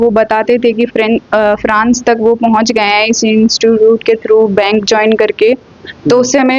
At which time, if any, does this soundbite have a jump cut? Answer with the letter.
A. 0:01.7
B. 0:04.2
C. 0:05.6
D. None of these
D